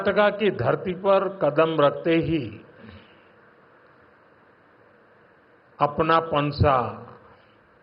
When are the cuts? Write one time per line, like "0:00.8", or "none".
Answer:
none